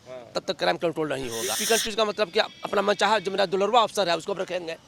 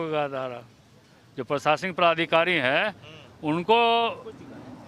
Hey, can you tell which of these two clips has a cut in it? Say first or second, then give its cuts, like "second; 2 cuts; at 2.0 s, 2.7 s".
first; 1 cut; at 1.6 s